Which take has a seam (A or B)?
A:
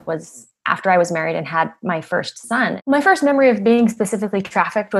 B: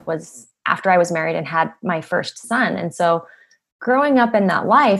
A